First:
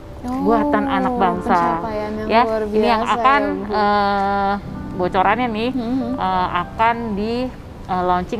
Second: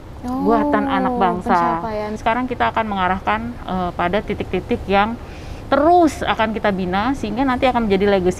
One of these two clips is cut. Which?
second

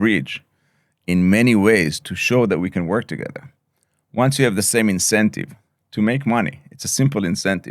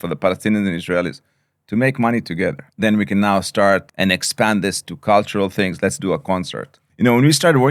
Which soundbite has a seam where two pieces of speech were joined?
second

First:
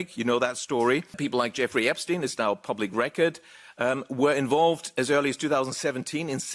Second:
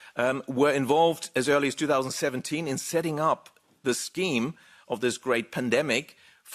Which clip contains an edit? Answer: first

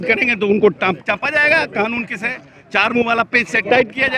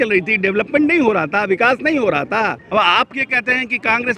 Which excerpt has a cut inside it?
second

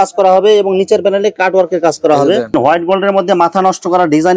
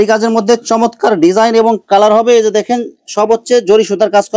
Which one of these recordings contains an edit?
first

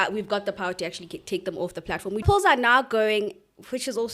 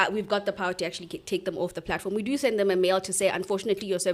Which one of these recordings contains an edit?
first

